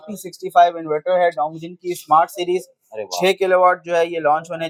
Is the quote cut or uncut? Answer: uncut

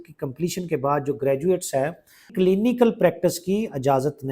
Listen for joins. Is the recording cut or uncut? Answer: cut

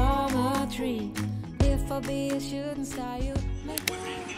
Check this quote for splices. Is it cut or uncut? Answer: uncut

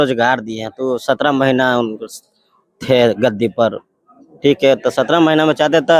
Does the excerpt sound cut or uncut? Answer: uncut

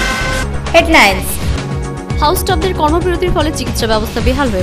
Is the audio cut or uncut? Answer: cut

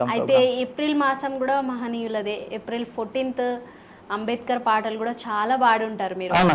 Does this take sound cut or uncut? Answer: uncut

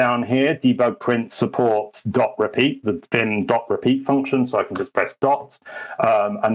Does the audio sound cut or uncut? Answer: uncut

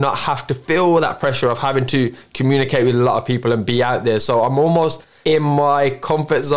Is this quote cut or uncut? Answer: cut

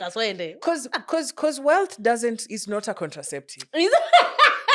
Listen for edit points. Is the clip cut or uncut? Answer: uncut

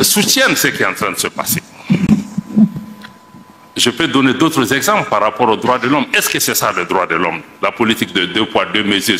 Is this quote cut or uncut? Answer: uncut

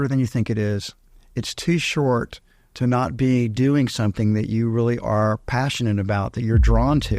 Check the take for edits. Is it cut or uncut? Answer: uncut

